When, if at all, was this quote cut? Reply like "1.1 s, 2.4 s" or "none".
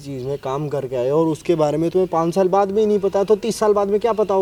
none